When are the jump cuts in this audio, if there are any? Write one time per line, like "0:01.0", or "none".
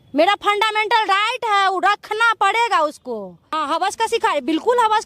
0:03.6